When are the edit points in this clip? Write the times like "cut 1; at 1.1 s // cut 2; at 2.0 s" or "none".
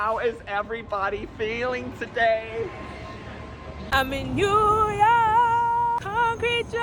cut 1; at 3.8 s

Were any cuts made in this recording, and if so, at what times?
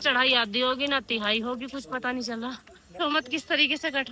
cut 1; at 2.9 s

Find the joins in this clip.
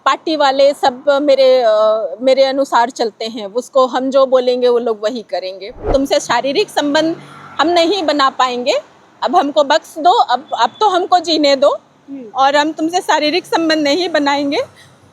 cut 1; at 5.9 s

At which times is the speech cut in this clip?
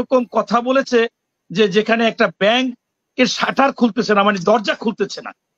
none

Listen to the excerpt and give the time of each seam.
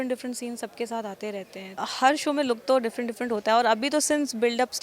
cut 1; at 1.8 s

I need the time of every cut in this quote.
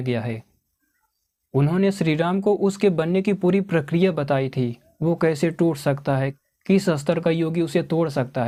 none

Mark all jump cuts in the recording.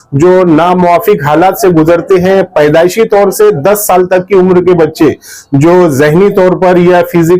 none

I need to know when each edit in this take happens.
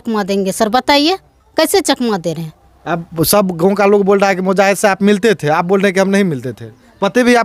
none

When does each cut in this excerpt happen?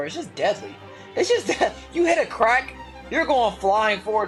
none

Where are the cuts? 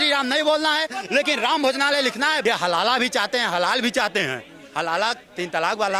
cut 1; at 2.4 s

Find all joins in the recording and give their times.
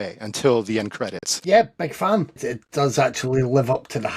cut 1; at 1.3 s // cut 2; at 2.4 s

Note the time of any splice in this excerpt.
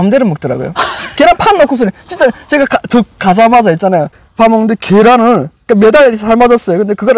none

